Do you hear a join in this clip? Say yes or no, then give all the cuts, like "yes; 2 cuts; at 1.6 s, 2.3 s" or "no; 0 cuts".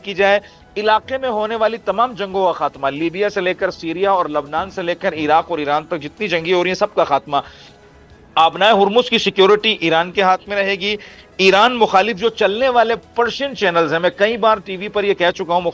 no; 0 cuts